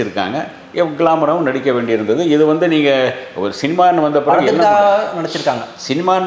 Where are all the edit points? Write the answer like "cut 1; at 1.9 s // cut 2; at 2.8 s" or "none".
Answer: none